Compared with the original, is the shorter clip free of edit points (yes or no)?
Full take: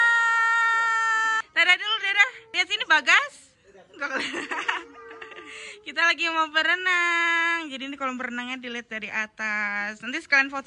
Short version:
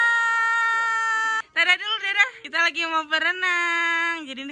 no